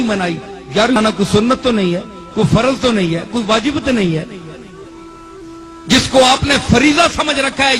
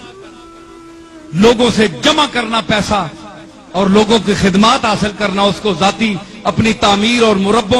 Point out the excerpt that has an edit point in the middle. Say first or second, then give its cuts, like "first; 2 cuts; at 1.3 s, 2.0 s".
first; 1 cut; at 0.9 s